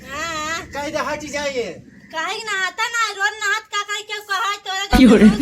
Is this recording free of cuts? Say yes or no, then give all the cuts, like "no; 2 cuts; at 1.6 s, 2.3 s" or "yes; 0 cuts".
no; 1 cut; at 4.5 s